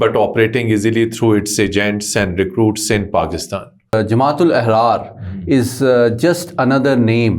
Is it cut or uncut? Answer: cut